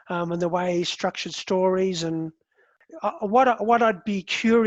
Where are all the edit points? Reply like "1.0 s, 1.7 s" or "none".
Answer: 2.8 s